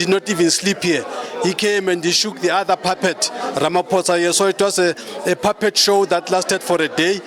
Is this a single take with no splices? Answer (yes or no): yes